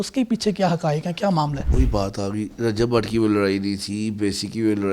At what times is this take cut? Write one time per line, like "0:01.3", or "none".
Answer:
0:01.6